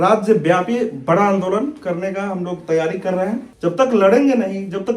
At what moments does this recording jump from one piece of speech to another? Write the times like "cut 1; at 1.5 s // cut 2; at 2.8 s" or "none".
cut 1; at 3.5 s